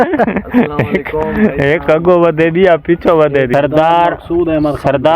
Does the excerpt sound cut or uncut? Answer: cut